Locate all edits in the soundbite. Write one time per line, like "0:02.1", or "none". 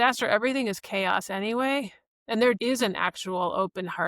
0:02.6